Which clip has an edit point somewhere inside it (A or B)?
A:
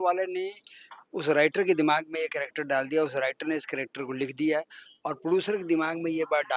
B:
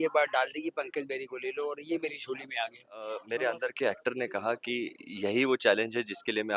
B